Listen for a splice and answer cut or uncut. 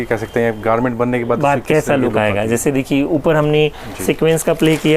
uncut